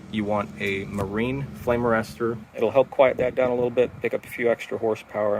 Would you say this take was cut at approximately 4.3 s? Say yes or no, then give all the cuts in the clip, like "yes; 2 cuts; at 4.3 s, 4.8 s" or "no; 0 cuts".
no; 1 cut; at 2.5 s